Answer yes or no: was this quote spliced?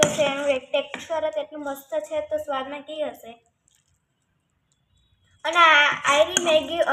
no